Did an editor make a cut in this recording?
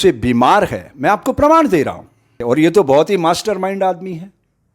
yes; 1 cut; at 2.4 s

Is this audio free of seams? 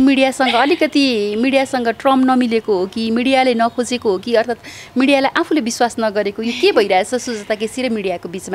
yes; 0 cuts

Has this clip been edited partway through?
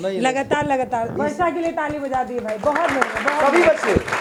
no; 0 cuts

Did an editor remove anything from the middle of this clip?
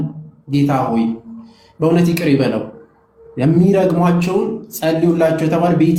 no; 0 cuts

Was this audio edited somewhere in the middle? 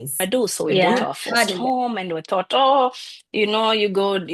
yes; 1 cut; at 1.6 s

